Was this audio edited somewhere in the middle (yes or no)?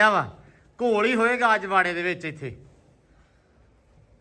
no